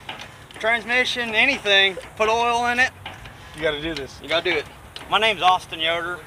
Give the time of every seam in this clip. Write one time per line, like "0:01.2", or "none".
0:04.9